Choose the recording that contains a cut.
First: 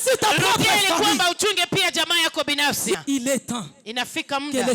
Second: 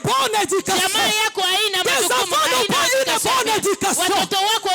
first; 1 cut; at 3.0 s

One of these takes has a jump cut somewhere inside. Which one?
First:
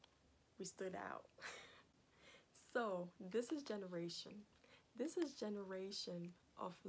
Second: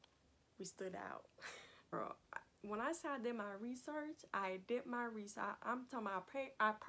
second; 1 cut; at 1.9 s

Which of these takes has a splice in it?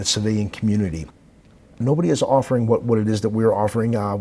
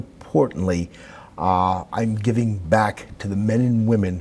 first; 1 cut; at 1.7 s

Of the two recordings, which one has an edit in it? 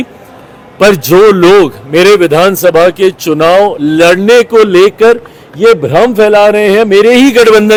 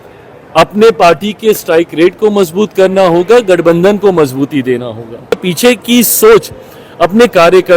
second; 1 cut; at 5.4 s

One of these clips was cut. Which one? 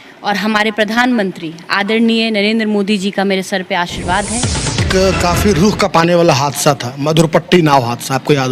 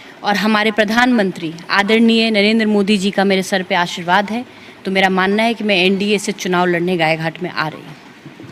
first; 1 cut; at 4.8 s

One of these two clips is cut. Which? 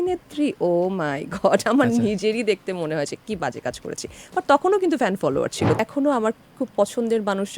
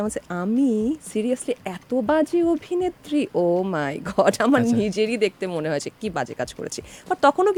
first; 1 cut; at 5.8 s

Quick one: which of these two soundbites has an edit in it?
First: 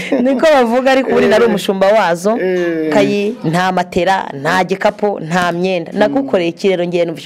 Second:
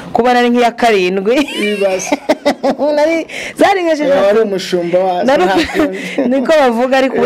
first; 1 cut; at 2.9 s

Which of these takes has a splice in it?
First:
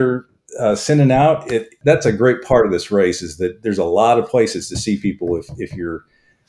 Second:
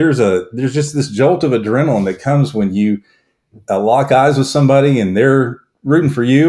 first; 1 cut; at 1.7 s

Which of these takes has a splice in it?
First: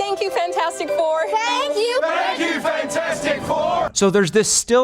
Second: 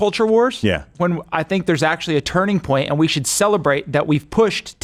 first; 1 cut; at 3.9 s

